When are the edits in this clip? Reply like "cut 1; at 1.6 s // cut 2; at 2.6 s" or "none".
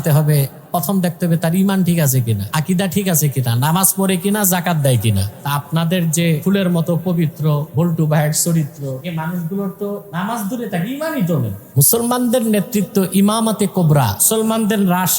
cut 1; at 2.4 s // cut 2; at 5.3 s // cut 3; at 6.4 s // cut 4; at 7.7 s // cut 5; at 9.0 s // cut 6; at 10.1 s // cut 7; at 11.6 s // cut 8; at 14.2 s